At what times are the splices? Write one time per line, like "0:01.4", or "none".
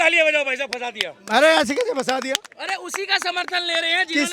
none